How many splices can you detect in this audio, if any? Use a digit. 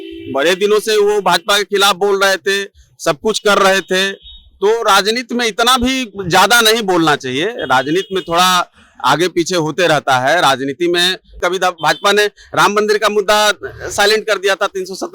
1